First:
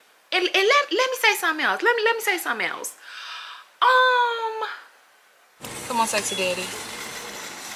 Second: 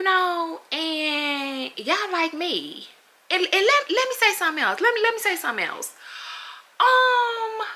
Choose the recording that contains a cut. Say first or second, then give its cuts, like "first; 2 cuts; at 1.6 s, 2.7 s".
first; 1 cut; at 5.7 s